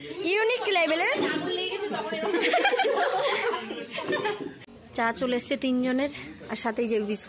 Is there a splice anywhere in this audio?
yes; 1 cut; at 4.6 s

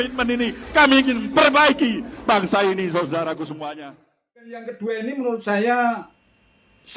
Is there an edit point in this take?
yes; 1 cut; at 4.7 s

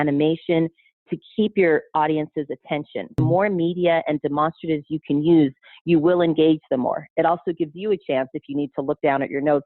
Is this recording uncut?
no; 1 cut; at 3.2 s

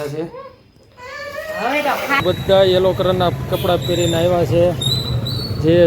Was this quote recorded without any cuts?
no; 1 cut; at 2.2 s

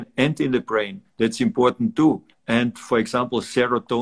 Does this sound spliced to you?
yes; 2 cuts; at 1.0 s, 2.3 s

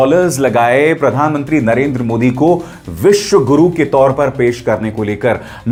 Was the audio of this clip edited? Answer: no; 0 cuts

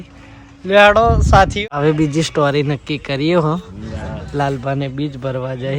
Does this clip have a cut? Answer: yes; 1 cut; at 1.5 s

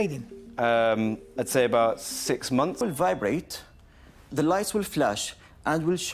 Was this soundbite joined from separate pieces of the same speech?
yes; 1 cut; at 2.8 s

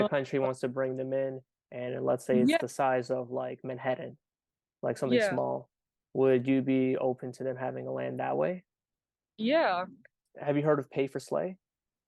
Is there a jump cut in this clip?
yes; 1 cut; at 10.3 s

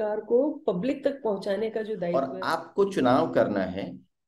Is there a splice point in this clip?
yes; 1 cut; at 2.0 s

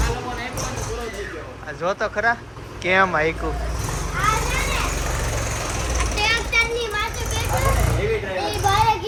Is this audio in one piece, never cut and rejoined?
yes; 0 cuts

